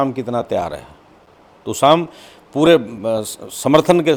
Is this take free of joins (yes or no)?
yes